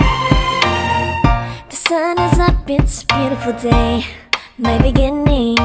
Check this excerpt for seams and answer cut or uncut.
cut